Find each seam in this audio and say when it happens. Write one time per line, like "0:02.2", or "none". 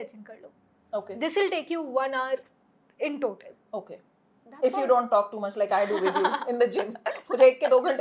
none